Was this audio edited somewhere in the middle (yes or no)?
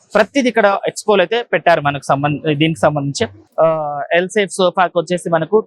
yes